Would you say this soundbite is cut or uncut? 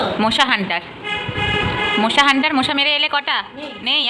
uncut